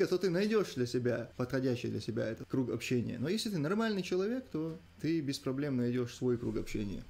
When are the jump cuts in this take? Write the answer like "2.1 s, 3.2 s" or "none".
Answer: 1.3 s, 2.4 s, 4.9 s